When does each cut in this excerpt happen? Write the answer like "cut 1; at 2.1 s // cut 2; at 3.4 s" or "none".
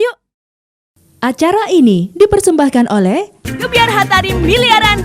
cut 1; at 1.0 s